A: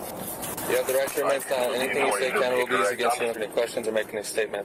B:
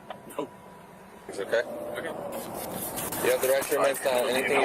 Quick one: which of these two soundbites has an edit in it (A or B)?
B